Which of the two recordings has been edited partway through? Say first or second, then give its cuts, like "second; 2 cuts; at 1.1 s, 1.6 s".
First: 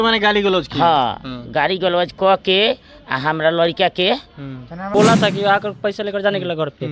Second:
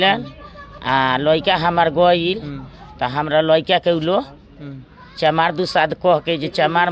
first; 1 cut; at 4.8 s